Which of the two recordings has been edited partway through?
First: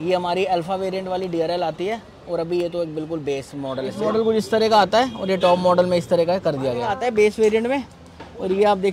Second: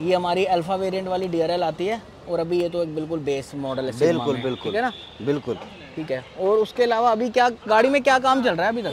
first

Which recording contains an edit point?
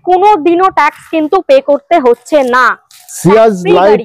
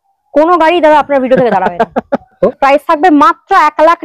second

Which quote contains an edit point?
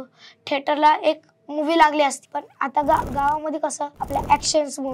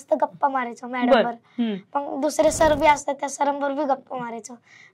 first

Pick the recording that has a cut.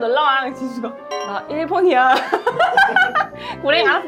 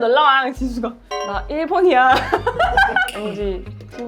second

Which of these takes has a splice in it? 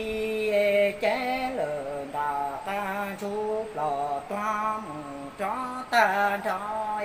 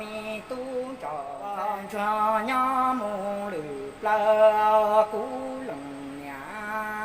second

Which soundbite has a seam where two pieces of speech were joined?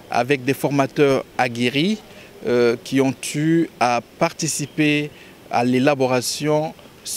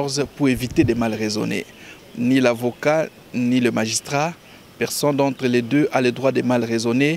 second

